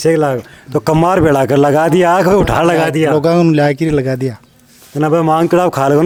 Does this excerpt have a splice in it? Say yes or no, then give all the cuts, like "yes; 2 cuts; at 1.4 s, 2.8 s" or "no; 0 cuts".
no; 0 cuts